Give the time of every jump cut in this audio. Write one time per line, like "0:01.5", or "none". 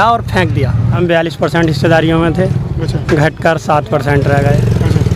0:01.0